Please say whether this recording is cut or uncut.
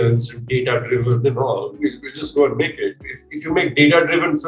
uncut